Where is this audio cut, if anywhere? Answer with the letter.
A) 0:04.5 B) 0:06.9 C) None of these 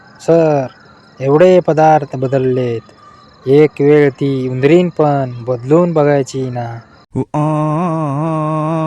B